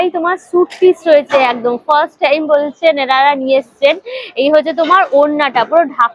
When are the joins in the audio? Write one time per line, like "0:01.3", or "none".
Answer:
none